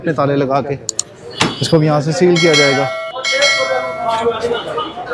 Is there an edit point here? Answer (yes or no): no